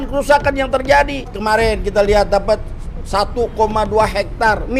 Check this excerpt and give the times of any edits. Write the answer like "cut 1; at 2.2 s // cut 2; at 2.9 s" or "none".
cut 1; at 1.3 s